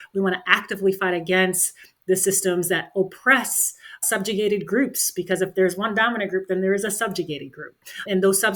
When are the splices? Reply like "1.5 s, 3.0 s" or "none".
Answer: none

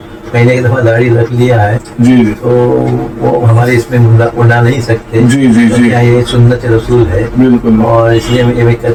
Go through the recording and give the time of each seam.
none

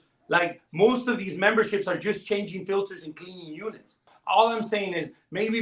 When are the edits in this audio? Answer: 4.1 s

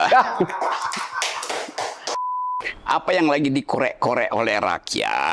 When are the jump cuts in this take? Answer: 2.4 s

